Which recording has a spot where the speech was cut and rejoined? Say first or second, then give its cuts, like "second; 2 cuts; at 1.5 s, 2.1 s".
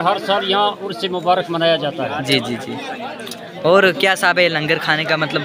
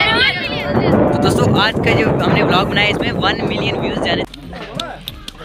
second; 1 cut; at 4.2 s